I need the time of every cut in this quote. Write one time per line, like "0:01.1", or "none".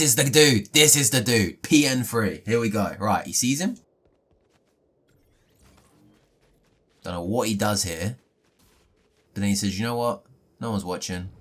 none